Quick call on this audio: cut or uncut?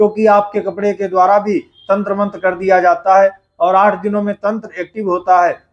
uncut